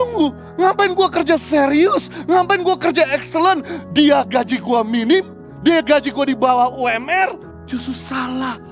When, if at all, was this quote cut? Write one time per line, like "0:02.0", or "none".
0:05.4
0:07.5